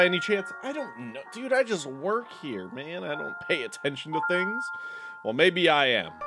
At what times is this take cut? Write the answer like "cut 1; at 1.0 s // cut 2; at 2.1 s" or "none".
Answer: none